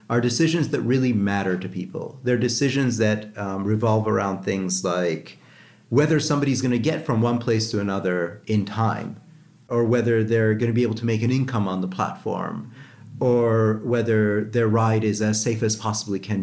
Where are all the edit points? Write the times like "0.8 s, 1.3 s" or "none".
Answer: none